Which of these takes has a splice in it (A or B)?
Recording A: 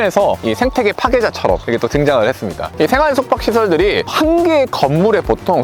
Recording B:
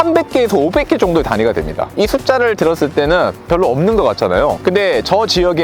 A